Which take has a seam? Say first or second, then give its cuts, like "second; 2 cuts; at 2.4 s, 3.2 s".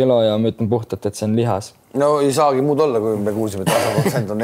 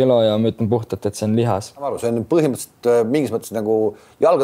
second; 1 cut; at 1.9 s